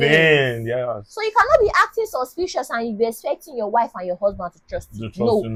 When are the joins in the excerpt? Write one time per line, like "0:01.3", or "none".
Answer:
none